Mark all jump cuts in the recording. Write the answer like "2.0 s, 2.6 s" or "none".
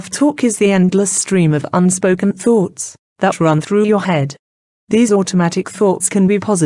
none